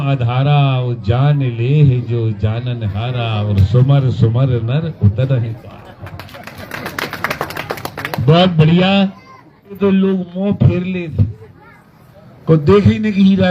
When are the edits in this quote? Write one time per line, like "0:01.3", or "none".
0:09.8